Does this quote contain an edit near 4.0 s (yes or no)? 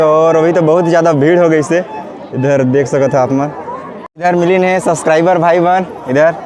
yes